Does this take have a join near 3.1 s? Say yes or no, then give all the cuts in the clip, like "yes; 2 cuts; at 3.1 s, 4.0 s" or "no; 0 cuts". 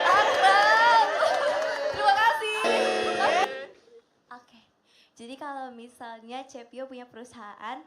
no; 0 cuts